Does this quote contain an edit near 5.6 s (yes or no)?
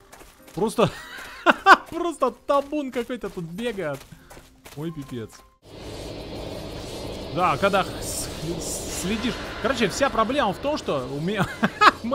yes